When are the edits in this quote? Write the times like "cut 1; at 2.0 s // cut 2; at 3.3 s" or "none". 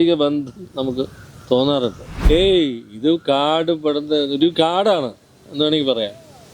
cut 1; at 2.2 s